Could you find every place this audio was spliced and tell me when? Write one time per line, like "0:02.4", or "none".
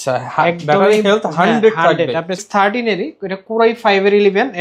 0:02.4